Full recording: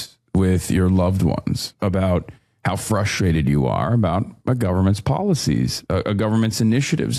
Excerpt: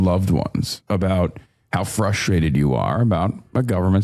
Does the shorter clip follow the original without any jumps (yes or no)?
yes